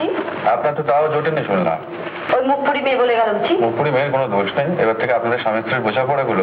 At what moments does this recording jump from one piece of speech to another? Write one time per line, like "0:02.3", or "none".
none

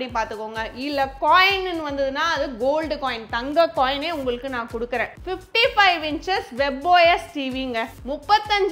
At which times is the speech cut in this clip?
0:05.1

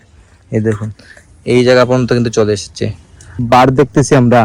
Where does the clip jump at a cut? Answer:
0:03.4

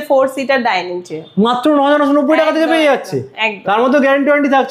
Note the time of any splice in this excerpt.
none

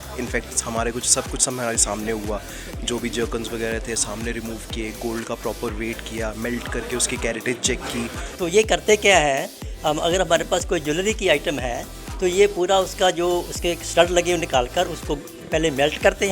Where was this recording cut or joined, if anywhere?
0:08.2

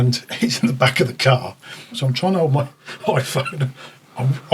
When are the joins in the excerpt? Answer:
0:02.0

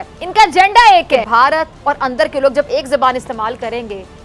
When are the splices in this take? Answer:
0:01.2

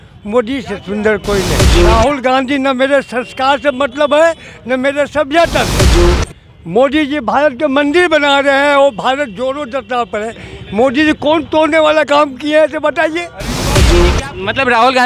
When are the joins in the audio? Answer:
0:01.6
0:13.9

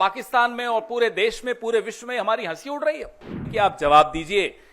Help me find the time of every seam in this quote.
0:03.4

